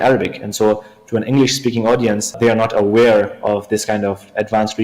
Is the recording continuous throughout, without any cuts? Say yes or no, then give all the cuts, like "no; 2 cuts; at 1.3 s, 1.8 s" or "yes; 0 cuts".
no; 1 cut; at 2.3 s